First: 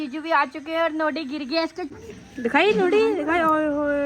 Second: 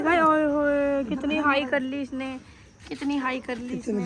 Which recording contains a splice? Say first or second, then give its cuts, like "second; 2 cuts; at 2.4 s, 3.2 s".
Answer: first; 1 cut; at 1.9 s